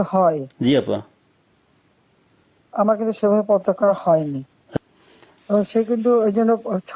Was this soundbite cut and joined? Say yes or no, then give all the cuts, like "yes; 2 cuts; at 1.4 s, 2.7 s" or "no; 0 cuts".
yes; 1 cut; at 4.8 s